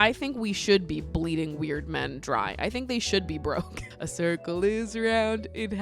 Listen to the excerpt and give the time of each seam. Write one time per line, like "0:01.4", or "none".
0:03.8